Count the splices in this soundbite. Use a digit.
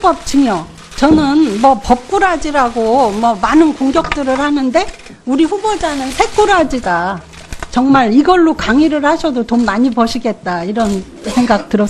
0